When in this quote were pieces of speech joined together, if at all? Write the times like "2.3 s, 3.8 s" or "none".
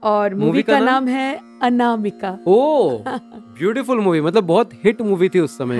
none